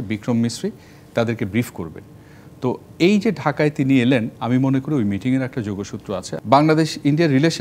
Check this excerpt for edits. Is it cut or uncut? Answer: cut